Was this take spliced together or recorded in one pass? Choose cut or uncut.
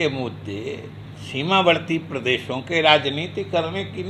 uncut